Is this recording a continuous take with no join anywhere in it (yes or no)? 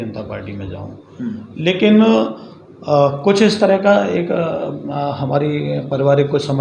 yes